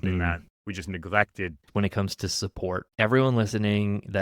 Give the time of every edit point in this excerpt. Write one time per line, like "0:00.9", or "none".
0:01.7
0:02.9